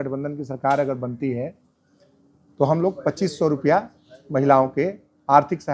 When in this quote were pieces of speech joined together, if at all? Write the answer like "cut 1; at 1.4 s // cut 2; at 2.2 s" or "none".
none